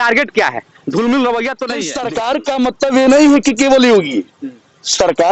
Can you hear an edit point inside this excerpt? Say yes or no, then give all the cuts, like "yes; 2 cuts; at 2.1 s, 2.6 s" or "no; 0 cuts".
yes; 1 cut; at 1.9 s